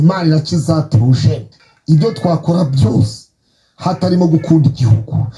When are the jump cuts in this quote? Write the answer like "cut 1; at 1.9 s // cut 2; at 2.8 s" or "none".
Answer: cut 1; at 1.5 s